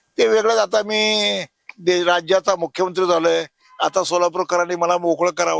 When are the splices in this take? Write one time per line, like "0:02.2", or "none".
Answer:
none